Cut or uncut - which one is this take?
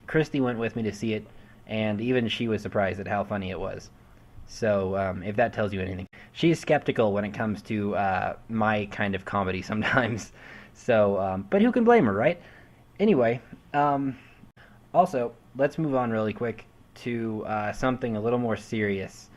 cut